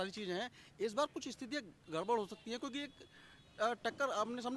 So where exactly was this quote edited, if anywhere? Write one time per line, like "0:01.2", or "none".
none